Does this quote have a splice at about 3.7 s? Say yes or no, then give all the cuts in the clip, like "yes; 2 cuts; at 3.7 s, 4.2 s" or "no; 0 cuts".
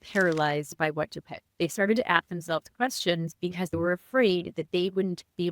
yes; 2 cuts; at 1.4 s, 3.7 s